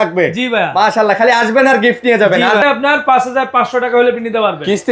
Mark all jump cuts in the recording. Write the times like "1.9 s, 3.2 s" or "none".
2.6 s